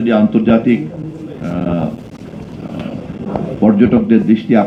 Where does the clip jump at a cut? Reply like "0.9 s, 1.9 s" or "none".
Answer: none

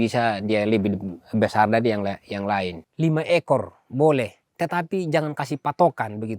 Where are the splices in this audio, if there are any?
2.8 s

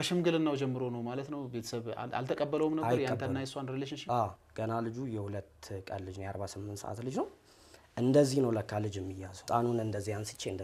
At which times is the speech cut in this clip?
4.4 s, 9.4 s

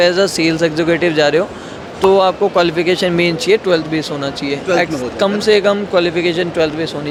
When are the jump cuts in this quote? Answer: none

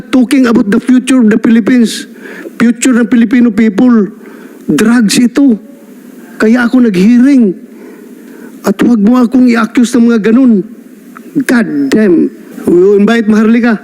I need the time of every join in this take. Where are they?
12.5 s

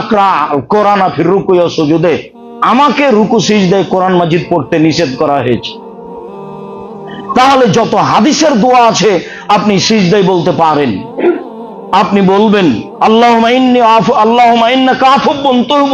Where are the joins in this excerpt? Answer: 5.9 s, 7.2 s

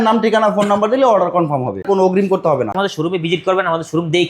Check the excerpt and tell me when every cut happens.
1.8 s, 2.8 s

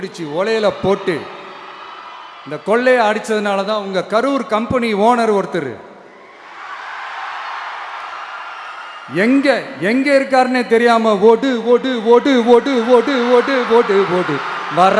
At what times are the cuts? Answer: none

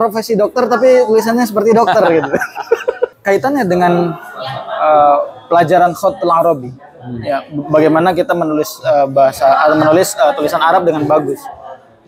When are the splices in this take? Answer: 3.2 s

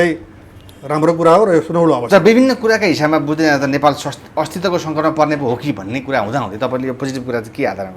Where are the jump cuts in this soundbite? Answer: none

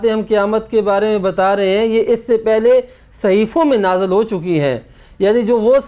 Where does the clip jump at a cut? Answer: none

